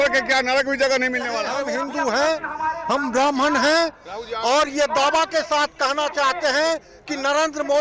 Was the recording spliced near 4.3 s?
no; 1 cut; at 1.6 s

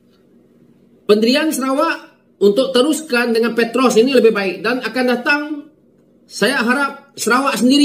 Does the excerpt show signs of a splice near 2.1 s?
no; 0 cuts

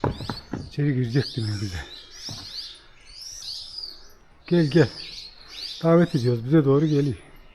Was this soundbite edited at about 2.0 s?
no; 1 cut; at 3.4 s

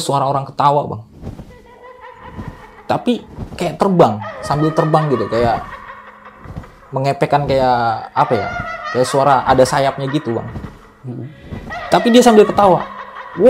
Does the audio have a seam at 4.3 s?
no; 0 cuts

